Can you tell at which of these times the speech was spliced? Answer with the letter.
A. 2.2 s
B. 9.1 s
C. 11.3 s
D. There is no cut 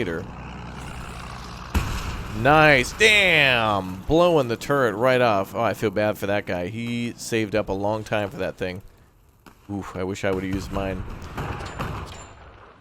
C